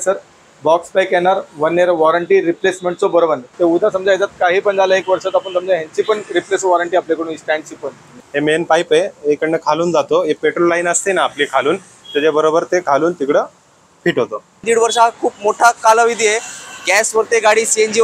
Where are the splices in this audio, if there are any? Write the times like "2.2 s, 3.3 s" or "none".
3.5 s, 8.2 s, 14.6 s